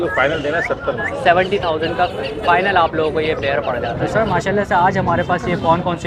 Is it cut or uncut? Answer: cut